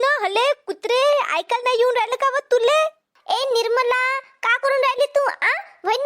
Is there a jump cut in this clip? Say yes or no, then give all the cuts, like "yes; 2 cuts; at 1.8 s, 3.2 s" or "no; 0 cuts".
yes; 1 cut; at 3.1 s